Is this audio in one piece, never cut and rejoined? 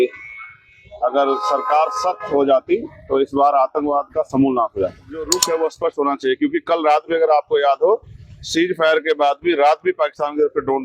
no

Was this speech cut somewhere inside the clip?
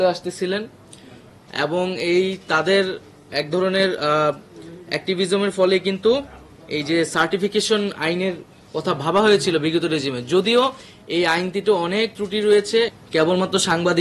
yes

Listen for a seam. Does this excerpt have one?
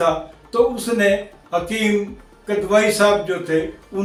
no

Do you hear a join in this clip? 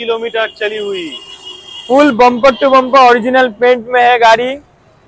no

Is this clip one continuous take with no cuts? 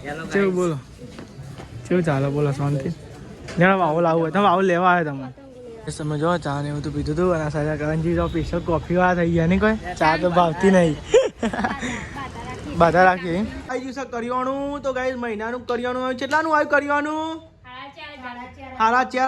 no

